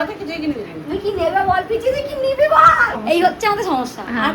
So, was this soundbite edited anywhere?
yes; 1 cut; at 2.9 s

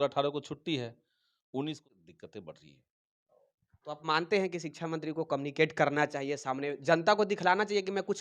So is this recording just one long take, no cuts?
no; 1 cut; at 1.9 s

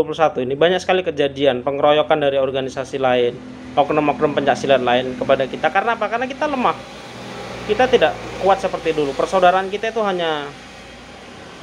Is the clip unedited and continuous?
yes; 0 cuts

